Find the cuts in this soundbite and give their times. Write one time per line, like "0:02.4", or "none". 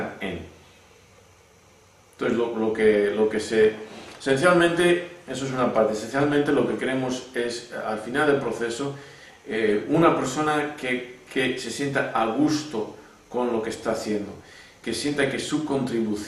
0:01.8